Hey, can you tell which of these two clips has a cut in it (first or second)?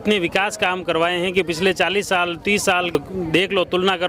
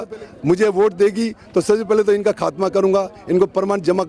first